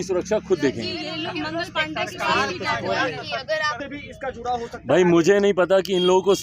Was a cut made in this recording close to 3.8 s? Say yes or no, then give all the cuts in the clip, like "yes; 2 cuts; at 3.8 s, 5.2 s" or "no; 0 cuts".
yes; 1 cut; at 3.8 s